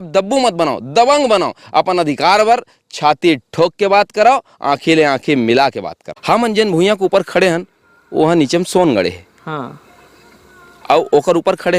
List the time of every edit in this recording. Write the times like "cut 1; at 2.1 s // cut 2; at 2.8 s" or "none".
cut 1; at 6.1 s